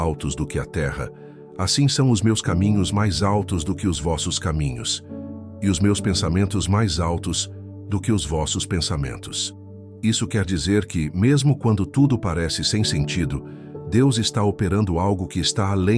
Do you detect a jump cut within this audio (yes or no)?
no